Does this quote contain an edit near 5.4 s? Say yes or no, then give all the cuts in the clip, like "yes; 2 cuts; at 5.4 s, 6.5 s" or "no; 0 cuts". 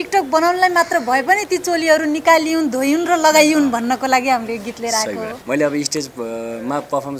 yes; 1 cut; at 5.4 s